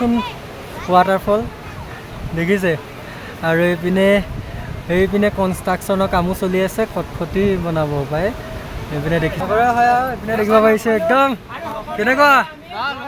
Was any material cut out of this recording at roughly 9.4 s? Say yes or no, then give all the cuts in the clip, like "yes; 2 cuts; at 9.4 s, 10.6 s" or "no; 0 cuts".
yes; 1 cut; at 9.4 s